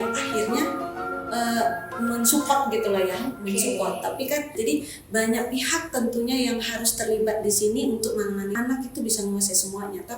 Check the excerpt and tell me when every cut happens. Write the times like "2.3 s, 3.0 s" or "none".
4.5 s, 8.5 s